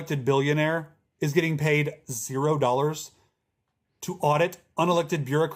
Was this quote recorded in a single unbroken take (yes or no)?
yes